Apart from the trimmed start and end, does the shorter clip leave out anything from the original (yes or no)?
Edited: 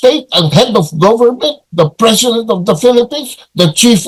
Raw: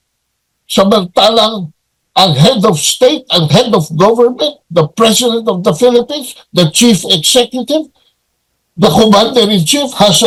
no